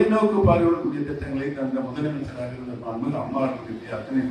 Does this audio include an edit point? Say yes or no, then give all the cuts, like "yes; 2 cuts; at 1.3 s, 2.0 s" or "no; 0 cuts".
no; 0 cuts